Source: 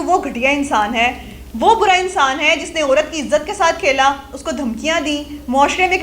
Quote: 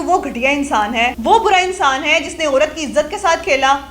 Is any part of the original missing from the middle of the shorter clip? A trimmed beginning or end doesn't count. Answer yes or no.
yes